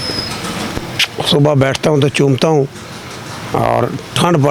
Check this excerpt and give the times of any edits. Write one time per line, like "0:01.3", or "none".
none